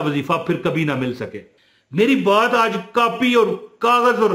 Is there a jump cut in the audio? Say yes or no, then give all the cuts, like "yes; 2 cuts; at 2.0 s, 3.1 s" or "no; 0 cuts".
yes; 1 cut; at 1.5 s